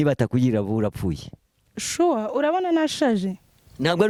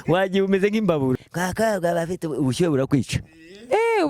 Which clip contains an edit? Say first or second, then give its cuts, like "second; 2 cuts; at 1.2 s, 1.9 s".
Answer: second; 1 cut; at 1.2 s